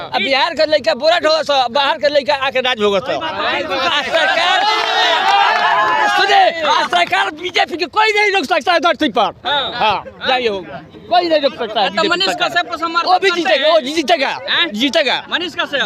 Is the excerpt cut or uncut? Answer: uncut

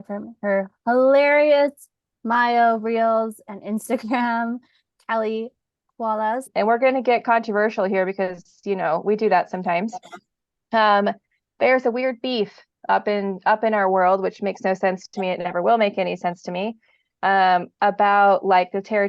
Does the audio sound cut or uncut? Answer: cut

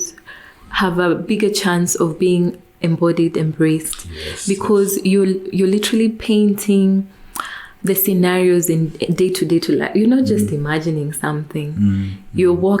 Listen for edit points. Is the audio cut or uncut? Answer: uncut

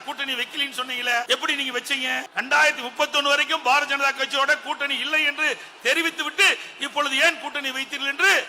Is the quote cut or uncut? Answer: cut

